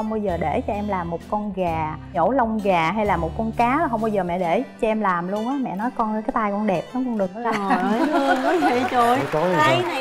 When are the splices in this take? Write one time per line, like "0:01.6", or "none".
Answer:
none